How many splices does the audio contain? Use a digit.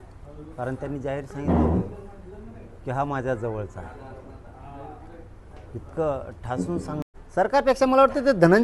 1